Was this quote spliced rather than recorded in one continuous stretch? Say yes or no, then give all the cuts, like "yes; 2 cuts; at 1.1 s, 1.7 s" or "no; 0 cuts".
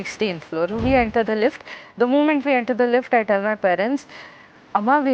no; 0 cuts